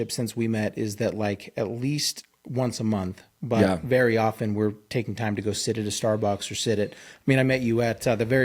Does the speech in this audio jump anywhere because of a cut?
no; 0 cuts

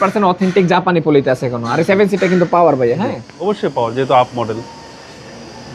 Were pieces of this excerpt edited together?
no; 0 cuts

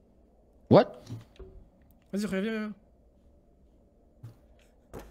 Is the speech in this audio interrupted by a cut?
no; 0 cuts

